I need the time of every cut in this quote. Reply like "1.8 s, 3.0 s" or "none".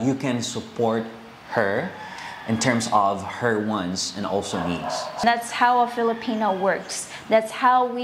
5.2 s